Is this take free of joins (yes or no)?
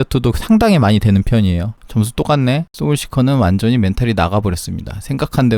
no